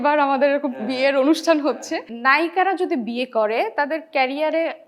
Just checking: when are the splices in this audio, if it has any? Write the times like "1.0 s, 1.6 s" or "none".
2.1 s